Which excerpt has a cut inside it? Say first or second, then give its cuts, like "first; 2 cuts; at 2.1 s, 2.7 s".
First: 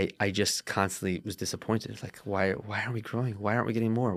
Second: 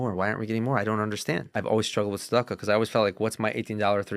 second; 1 cut; at 1.5 s